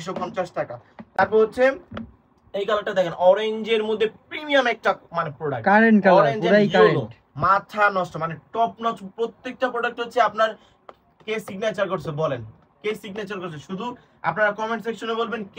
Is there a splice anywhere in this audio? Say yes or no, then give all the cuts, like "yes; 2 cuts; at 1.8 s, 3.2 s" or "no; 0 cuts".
no; 0 cuts